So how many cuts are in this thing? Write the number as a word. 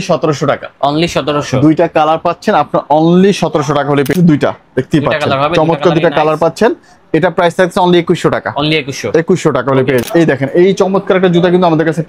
two